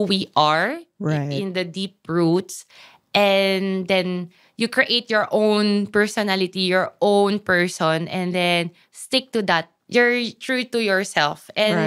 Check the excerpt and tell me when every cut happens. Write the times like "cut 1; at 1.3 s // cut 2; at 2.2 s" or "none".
cut 1; at 9.7 s